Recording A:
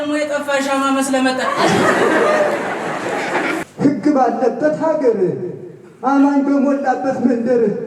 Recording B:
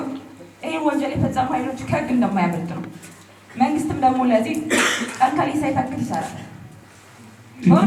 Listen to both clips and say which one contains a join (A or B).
A